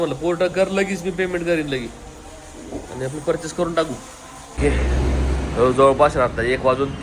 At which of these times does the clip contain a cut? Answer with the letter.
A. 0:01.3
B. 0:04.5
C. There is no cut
B